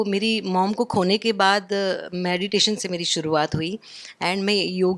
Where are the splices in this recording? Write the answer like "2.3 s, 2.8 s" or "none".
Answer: none